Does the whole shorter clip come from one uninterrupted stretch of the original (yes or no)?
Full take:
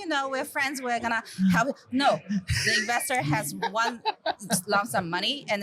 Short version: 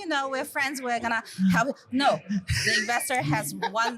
yes